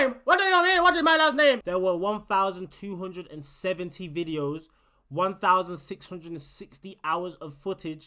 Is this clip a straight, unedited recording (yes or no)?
no